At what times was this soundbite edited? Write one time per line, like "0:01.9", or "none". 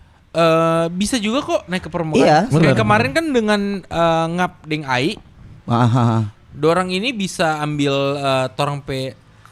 none